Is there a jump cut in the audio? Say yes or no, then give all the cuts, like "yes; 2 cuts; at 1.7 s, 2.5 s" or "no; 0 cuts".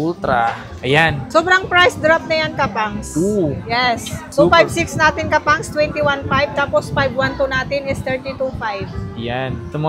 no; 0 cuts